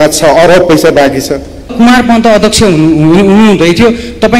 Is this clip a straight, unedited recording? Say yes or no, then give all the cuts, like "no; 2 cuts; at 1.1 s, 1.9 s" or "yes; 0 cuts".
no; 1 cut; at 1.7 s